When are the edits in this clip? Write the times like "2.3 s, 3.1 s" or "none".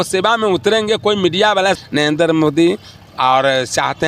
1.8 s